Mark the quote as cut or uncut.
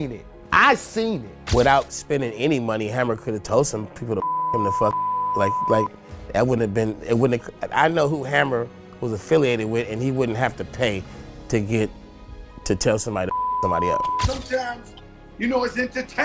cut